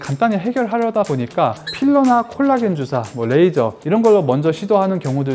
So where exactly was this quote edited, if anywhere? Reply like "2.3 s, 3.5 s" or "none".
none

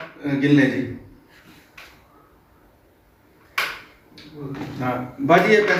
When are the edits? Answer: none

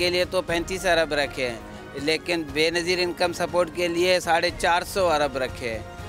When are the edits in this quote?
none

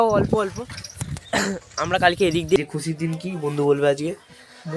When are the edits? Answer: 2.6 s

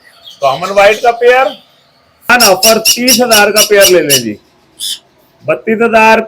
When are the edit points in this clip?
2.3 s

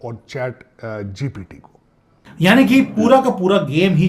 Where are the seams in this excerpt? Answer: 2.6 s

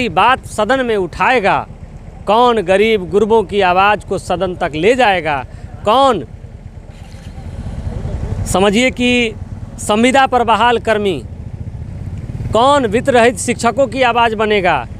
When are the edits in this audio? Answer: none

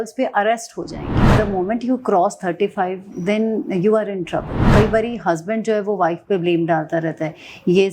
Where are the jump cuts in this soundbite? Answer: 1.3 s, 4.6 s

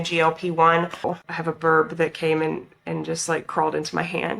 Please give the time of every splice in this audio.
1.0 s

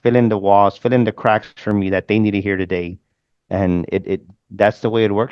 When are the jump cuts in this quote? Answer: none

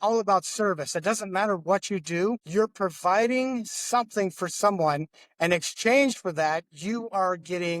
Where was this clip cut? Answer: none

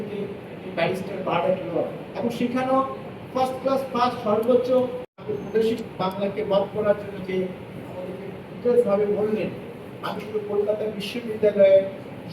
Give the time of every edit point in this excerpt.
5.2 s

